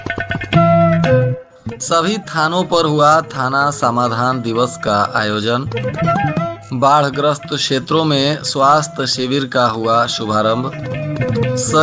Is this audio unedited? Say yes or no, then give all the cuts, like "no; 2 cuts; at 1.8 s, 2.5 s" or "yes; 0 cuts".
no; 1 cut; at 1.4 s